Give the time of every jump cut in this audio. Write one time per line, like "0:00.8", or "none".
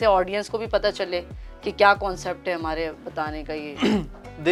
none